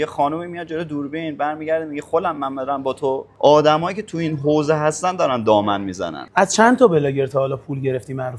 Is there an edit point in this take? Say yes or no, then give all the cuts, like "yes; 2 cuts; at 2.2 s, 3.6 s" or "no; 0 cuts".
yes; 2 cuts; at 3.3 s, 6.2 s